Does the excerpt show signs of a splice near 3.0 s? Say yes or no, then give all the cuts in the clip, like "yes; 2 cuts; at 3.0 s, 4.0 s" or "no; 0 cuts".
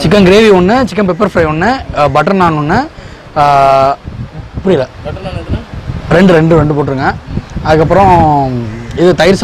no; 0 cuts